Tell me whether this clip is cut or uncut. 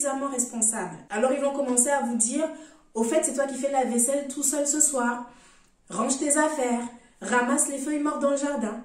uncut